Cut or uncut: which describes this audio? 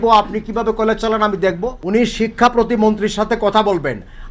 cut